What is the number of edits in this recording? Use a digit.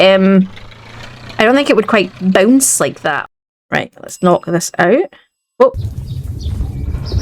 1